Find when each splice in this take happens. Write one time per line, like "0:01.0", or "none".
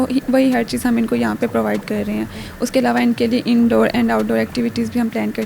none